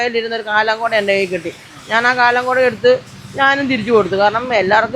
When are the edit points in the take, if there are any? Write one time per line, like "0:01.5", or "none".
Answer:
none